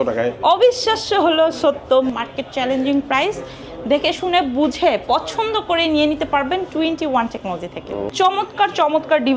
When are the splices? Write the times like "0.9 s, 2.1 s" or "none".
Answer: 2.1 s, 8.1 s